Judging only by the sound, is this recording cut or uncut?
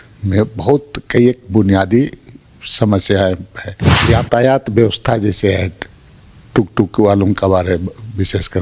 cut